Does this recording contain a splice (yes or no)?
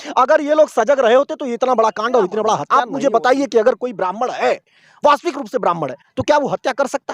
yes